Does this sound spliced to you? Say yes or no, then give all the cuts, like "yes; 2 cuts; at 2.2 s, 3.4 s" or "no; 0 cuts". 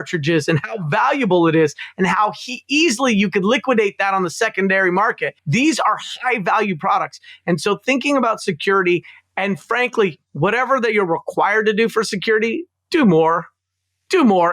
yes; 2 cuts; at 5.4 s, 10.2 s